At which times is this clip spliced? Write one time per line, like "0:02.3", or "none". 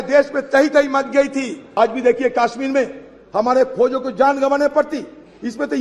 0:01.8